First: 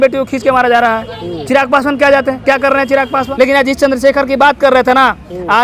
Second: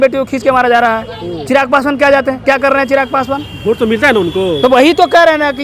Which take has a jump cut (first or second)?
first